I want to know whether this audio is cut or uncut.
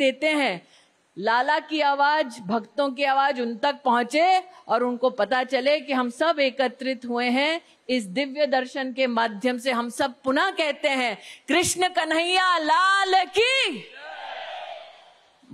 uncut